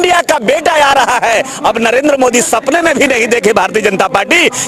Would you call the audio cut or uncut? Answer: uncut